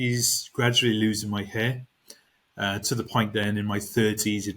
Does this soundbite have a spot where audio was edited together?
no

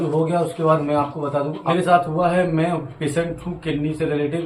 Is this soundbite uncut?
no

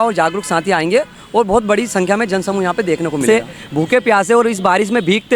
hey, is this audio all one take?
no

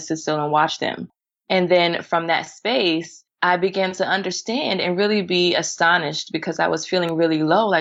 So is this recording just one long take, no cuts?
yes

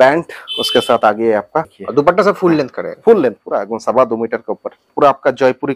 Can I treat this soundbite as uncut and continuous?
no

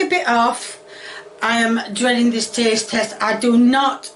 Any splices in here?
no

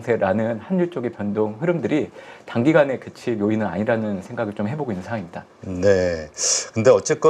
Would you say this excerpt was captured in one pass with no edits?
yes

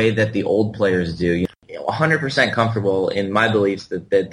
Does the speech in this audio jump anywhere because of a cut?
yes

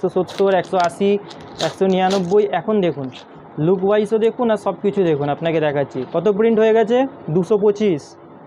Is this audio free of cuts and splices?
yes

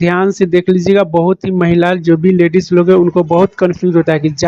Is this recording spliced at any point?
no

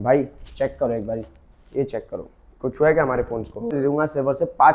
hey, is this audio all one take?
no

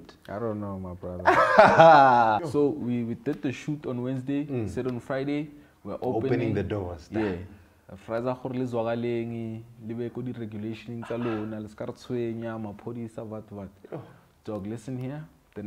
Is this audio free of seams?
no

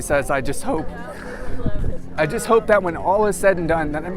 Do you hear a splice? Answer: yes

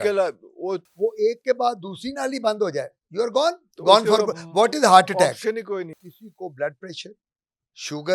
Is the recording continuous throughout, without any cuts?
no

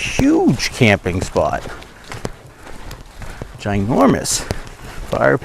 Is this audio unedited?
yes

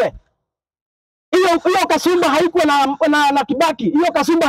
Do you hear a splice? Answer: no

